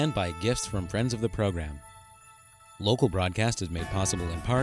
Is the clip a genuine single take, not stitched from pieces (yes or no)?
yes